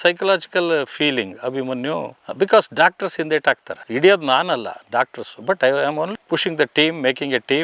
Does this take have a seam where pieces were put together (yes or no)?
no